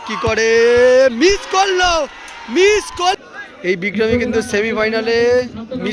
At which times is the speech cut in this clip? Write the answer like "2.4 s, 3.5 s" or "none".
3.1 s

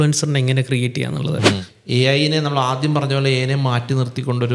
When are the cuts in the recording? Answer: 1.7 s

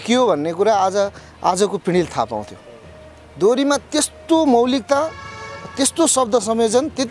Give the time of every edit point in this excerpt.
none

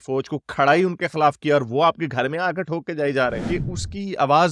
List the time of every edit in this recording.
3.4 s

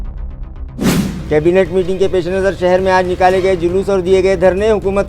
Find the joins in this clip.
0.9 s

